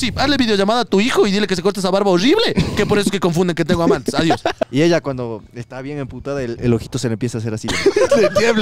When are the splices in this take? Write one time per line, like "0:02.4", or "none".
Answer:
0:04.6

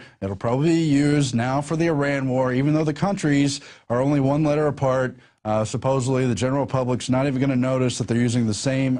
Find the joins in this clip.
none

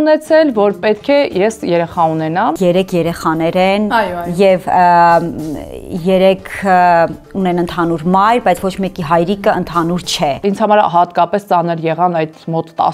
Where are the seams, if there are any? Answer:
0:02.5
0:10.4

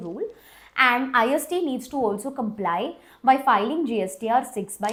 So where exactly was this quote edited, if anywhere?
none

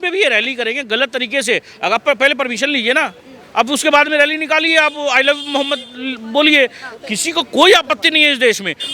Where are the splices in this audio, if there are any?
none

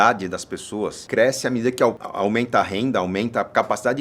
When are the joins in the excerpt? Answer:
0:01.0
0:02.1

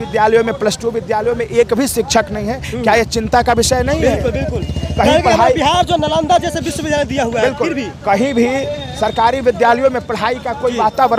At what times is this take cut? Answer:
none

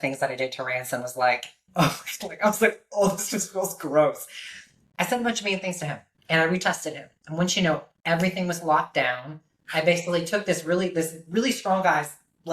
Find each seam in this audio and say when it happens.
0:01.6
0:06.1

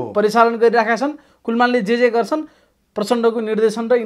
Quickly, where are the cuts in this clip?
none

